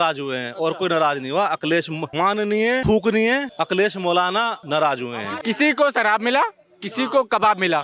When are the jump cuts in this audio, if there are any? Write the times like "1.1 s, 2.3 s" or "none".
2.3 s, 3.5 s, 4.6 s, 5.3 s